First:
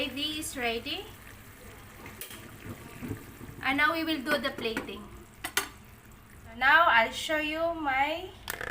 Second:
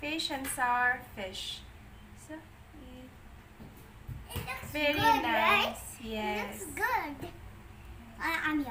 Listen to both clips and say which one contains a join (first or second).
first